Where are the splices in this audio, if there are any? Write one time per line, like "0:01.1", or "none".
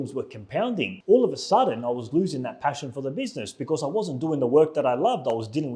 0:01.0